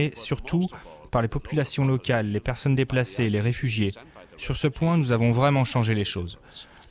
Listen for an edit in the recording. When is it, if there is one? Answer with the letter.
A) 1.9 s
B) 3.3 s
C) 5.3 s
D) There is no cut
D